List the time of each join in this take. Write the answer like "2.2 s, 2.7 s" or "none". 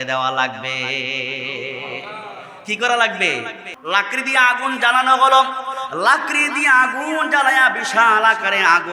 3.7 s